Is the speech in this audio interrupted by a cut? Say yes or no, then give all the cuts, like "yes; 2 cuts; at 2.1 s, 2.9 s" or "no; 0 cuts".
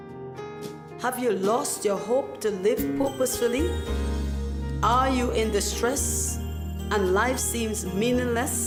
no; 0 cuts